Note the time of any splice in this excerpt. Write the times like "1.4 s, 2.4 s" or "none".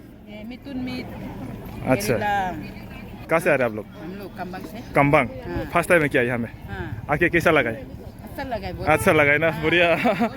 3.1 s